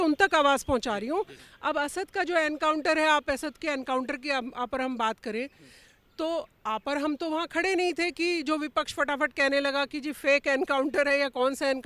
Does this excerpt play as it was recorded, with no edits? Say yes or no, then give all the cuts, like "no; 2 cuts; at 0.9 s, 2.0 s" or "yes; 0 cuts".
no; 1 cut; at 1.4 s